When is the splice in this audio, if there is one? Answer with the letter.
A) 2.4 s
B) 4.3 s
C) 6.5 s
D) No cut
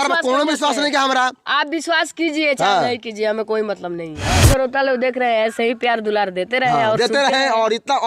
B